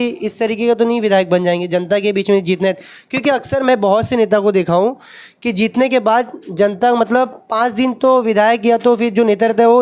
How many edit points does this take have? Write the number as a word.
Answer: zero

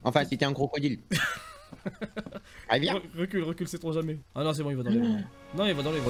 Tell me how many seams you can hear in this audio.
one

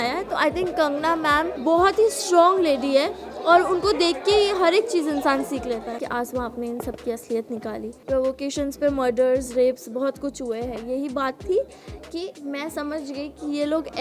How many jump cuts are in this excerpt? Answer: three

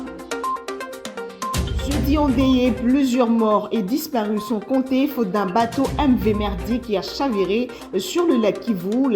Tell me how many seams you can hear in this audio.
two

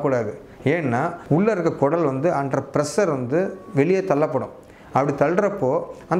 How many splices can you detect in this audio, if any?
one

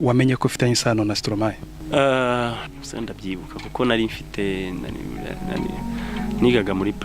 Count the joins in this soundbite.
two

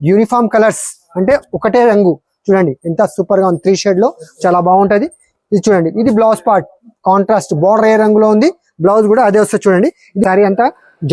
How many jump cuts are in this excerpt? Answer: one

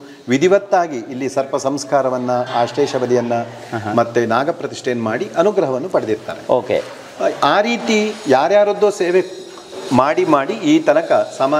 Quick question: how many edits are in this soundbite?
zero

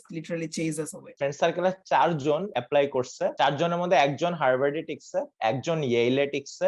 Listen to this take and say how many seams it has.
three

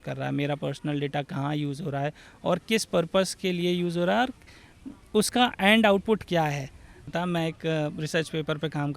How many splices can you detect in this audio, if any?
one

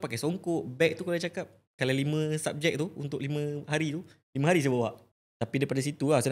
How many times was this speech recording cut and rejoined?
one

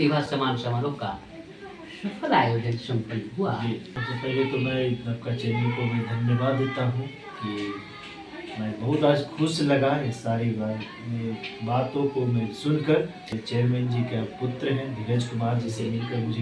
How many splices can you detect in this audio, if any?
two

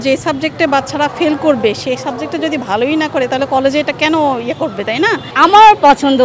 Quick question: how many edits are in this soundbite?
one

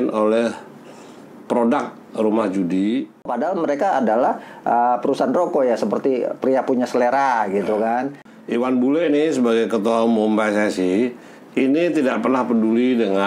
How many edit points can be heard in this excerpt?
two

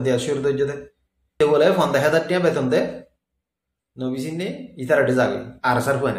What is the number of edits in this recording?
one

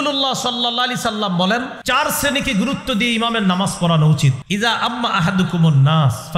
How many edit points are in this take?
two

